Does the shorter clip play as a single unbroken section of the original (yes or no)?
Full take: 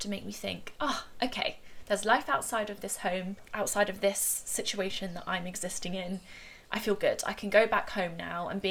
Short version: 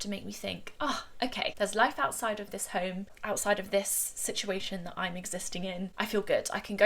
no